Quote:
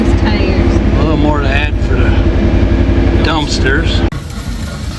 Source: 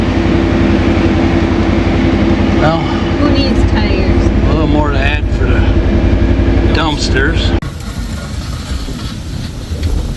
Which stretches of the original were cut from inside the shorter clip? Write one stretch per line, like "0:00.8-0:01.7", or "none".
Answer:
none